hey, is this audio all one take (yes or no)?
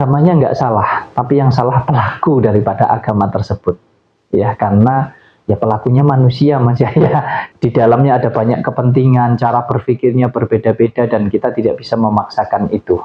no